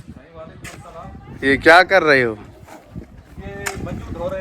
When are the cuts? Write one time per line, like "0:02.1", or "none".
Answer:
none